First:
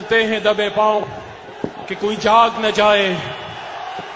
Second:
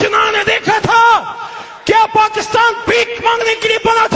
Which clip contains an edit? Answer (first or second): first